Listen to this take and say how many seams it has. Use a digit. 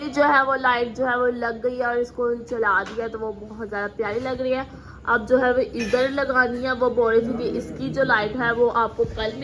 0